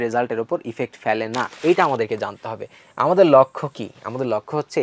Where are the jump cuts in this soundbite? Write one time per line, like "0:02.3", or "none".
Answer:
0:01.5